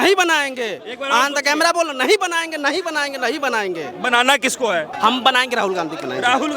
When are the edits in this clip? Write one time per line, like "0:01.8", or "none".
0:04.9